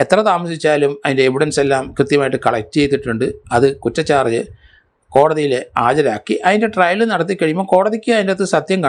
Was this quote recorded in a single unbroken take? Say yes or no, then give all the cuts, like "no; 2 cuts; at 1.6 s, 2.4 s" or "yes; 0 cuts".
yes; 0 cuts